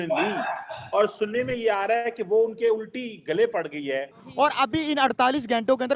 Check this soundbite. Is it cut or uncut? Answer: cut